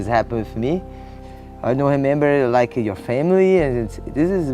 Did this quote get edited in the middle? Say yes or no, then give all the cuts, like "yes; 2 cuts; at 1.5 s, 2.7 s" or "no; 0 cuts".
yes; 1 cut; at 1.2 s